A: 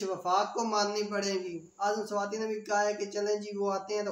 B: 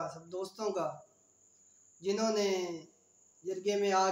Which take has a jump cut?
A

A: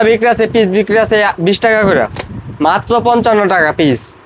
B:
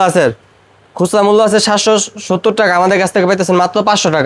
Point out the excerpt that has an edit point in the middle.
A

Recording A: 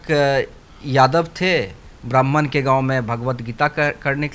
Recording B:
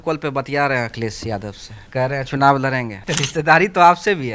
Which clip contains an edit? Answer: B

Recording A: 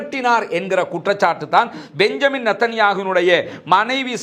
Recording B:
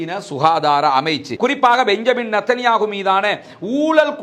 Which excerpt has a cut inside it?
B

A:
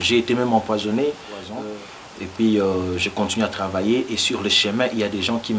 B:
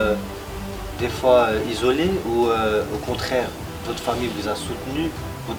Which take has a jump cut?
A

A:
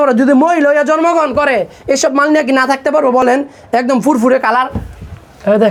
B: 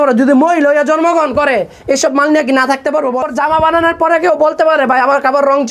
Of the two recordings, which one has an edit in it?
B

